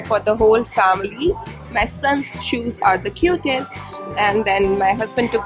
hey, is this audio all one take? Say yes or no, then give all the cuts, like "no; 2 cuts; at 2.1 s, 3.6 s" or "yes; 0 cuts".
yes; 0 cuts